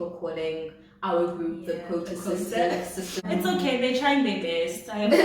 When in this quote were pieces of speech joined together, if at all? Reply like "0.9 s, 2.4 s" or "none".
3.1 s